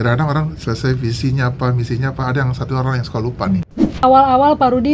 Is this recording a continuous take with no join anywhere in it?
no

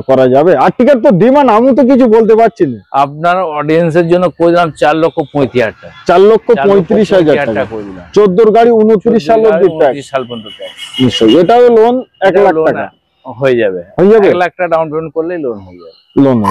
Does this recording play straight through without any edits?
yes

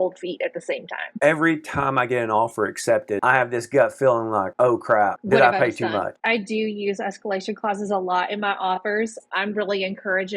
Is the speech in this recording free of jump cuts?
no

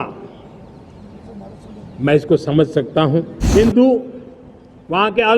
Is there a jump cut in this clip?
yes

